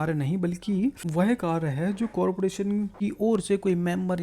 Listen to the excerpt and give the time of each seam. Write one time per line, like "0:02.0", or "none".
0:01.0
0:02.9